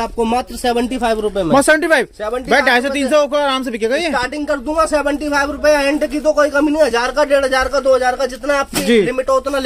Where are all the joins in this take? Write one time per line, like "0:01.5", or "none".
none